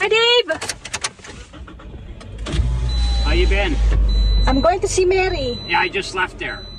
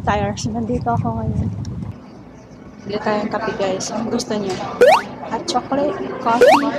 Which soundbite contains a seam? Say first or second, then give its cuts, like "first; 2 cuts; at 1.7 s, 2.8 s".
second; 1 cut; at 1.9 s